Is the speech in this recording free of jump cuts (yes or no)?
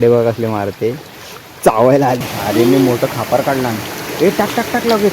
no